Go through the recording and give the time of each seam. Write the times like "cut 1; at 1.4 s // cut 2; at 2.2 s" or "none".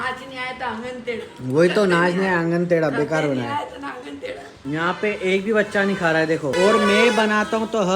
cut 1; at 4.6 s // cut 2; at 6.5 s